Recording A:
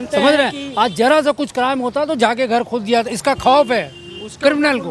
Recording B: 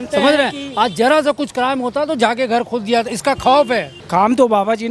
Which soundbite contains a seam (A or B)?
B